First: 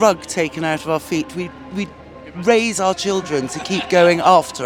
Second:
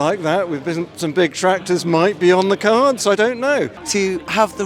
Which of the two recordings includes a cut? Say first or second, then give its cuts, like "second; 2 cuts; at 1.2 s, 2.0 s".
second; 1 cut; at 3.8 s